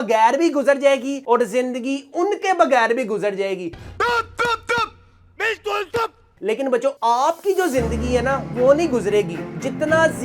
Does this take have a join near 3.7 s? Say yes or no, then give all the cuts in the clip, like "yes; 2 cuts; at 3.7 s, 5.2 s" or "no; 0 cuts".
no; 0 cuts